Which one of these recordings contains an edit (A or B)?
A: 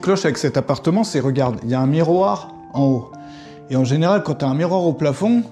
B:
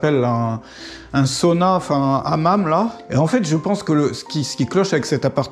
B